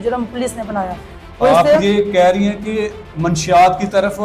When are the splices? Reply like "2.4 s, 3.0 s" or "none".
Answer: none